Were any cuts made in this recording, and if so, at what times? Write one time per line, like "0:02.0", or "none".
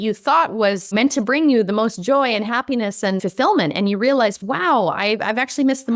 0:00.9
0:03.2